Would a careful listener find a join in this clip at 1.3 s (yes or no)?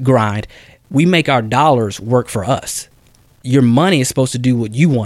no